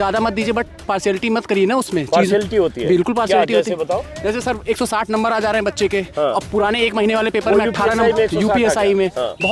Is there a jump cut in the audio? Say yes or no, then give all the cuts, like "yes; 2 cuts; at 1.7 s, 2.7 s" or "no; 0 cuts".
no; 0 cuts